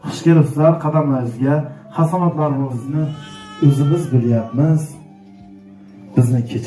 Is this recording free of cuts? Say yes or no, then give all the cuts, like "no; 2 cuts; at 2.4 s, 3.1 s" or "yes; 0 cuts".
no; 1 cut; at 2.7 s